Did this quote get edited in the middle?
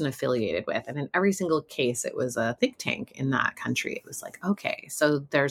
no; 0 cuts

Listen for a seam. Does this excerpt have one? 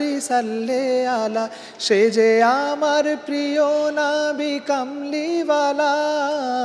no; 0 cuts

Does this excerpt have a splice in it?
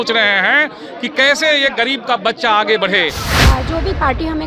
yes; 1 cut; at 3.3 s

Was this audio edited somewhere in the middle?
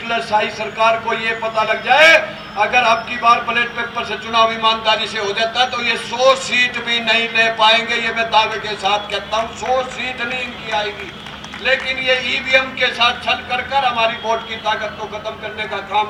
no; 0 cuts

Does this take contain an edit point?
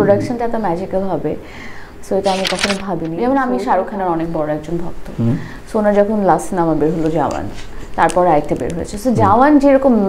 yes; 1 cut; at 3.1 s

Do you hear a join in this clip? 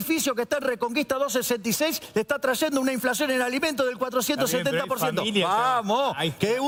no; 0 cuts

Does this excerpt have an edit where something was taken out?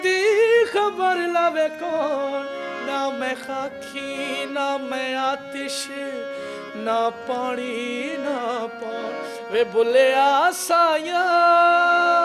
no; 0 cuts

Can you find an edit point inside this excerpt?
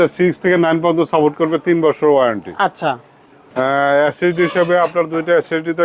no; 0 cuts

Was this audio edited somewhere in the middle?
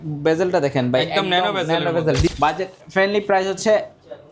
yes; 1 cut; at 2.3 s

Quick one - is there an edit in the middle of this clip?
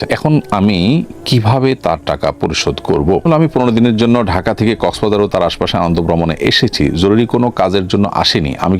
yes; 1 cut; at 3.2 s

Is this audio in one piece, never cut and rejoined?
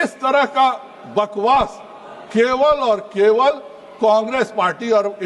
yes; 0 cuts

